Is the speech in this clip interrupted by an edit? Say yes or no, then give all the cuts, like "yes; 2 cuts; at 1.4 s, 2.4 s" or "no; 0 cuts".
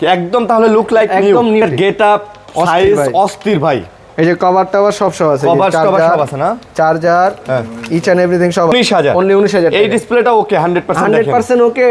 yes; 2 cuts; at 1.6 s, 8.7 s